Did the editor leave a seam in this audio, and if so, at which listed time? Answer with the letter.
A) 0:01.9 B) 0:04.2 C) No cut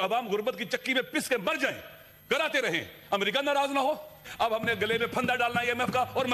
B